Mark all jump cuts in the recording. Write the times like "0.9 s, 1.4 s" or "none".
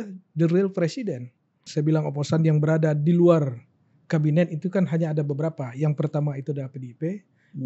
1.6 s